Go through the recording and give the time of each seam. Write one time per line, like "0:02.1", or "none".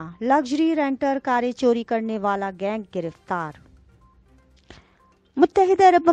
0:04.3